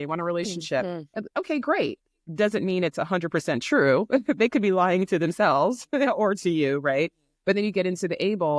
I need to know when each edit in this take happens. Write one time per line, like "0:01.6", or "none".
none